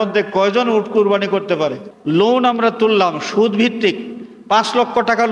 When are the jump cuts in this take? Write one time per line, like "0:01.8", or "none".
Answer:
0:01.9